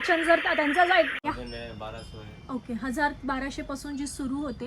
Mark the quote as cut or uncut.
cut